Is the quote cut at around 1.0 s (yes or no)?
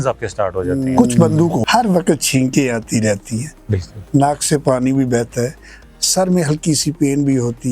yes